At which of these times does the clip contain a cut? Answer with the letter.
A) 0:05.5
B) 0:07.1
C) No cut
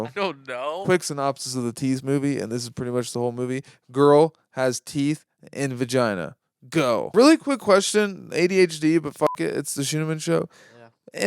B